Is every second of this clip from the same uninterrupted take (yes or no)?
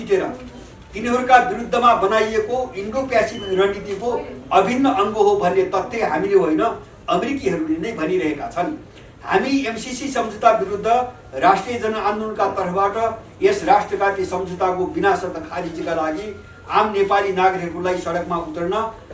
yes